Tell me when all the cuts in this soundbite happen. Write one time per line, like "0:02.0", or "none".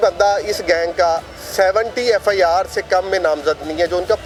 none